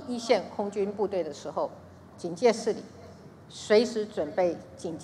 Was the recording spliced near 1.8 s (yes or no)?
no